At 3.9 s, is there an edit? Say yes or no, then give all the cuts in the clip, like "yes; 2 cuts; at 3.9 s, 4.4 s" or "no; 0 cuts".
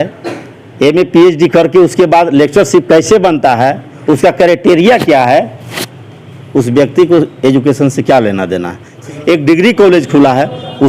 no; 1 cut; at 9.0 s